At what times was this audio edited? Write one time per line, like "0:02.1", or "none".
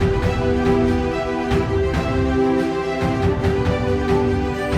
none